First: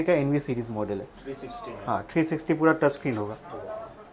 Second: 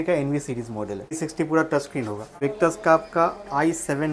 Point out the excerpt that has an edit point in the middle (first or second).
second